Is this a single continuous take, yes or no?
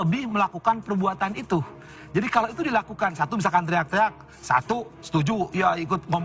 yes